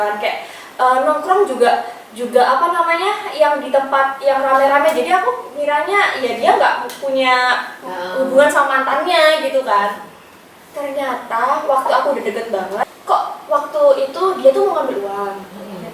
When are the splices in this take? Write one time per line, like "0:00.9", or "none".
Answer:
0:12.8